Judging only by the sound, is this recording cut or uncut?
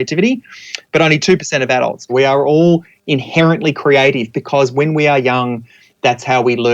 cut